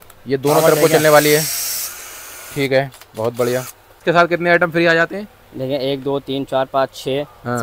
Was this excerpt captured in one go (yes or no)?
no